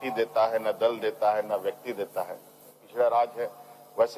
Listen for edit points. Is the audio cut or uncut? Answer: cut